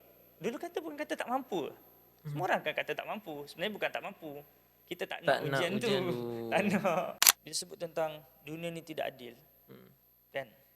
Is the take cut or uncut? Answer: cut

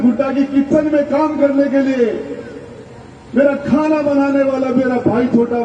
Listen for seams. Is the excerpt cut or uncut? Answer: uncut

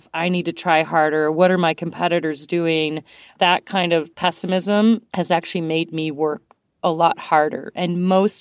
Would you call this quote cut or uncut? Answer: cut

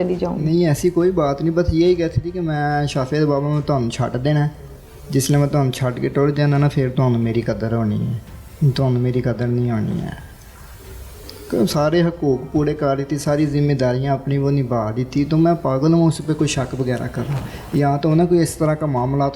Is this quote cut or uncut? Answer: uncut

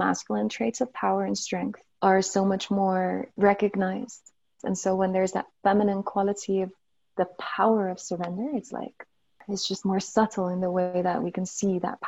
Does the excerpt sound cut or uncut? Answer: cut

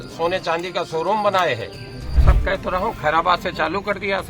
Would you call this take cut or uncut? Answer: cut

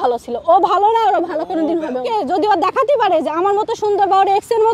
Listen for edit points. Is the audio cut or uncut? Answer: cut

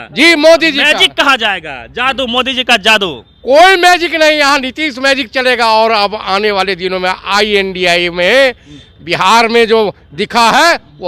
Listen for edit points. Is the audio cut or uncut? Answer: uncut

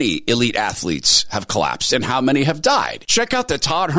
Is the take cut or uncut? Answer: cut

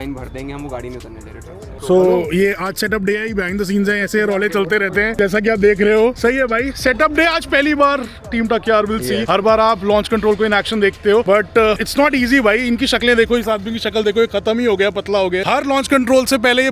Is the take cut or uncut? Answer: uncut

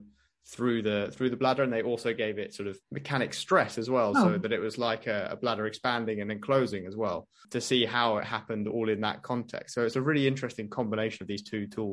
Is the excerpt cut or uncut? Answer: uncut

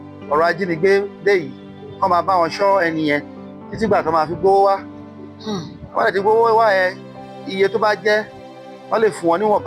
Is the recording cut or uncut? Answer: uncut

